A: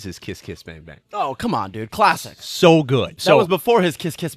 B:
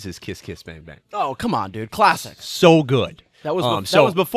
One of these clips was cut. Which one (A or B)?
A